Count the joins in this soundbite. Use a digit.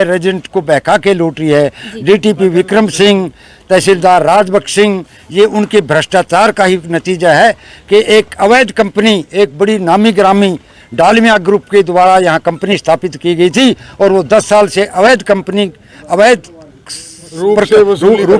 0